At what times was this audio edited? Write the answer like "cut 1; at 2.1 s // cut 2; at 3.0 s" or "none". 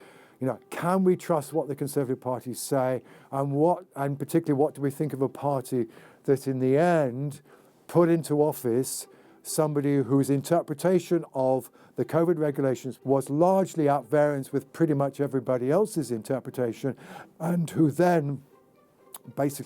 cut 1; at 12.9 s